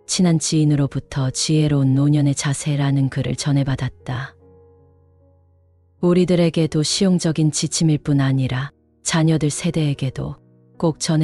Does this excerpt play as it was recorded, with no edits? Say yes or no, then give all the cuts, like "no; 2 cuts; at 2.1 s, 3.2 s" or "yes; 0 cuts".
yes; 0 cuts